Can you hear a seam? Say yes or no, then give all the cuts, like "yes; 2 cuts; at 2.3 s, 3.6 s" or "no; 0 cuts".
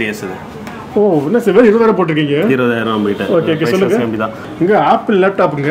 yes; 1 cut; at 4.4 s